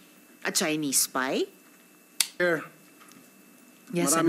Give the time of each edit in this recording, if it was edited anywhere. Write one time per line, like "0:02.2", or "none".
0:02.4